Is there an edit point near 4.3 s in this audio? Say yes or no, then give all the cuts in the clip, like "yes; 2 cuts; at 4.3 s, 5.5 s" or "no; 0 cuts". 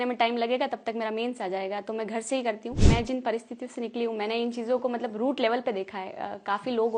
no; 1 cut; at 2.8 s